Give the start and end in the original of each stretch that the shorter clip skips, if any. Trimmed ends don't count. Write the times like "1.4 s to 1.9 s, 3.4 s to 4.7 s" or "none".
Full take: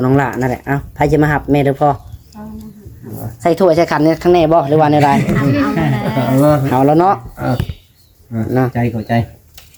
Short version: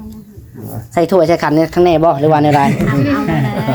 none